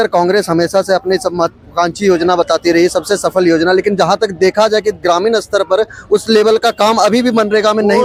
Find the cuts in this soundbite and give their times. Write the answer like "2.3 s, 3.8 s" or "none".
none